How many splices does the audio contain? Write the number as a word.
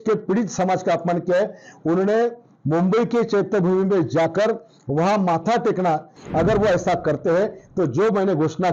one